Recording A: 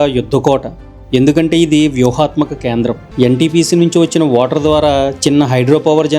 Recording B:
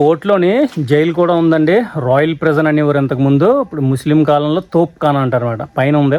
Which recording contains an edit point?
A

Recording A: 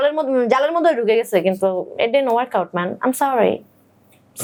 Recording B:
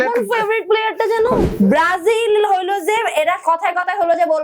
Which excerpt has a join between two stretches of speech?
B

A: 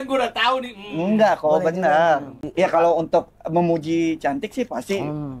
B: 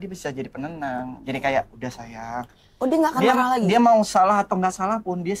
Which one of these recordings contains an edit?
A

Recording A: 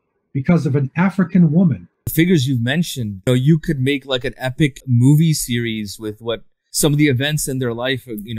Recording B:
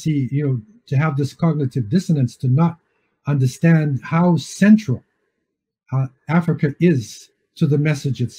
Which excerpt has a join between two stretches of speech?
A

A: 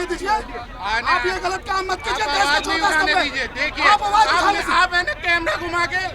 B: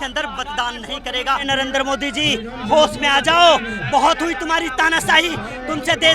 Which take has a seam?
B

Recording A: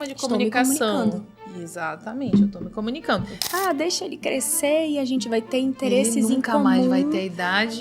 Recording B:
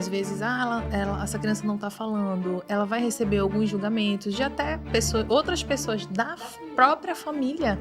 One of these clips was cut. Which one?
A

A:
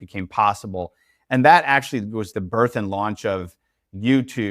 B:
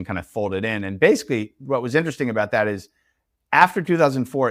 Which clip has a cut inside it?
A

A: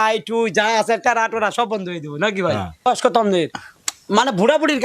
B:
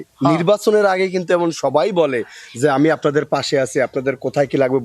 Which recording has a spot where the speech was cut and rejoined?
A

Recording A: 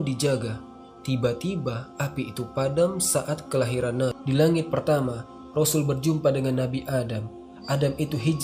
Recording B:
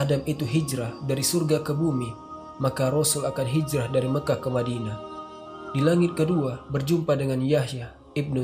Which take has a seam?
A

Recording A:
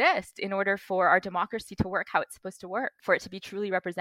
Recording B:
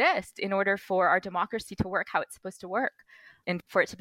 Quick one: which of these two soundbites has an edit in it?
A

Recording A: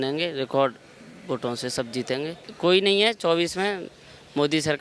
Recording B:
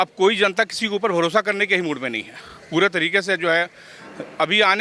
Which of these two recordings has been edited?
A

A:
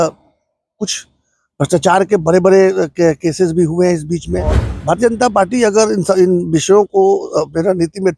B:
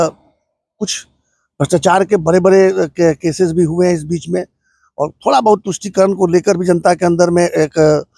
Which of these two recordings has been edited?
A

